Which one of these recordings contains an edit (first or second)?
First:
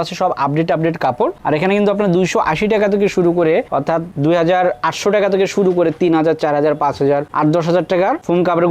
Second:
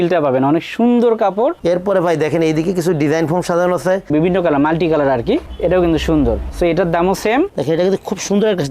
second